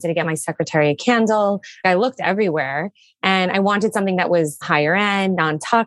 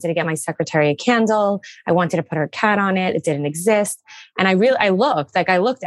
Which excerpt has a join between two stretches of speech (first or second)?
first